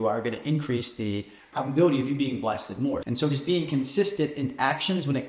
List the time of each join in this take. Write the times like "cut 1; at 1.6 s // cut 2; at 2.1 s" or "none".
cut 1; at 3.1 s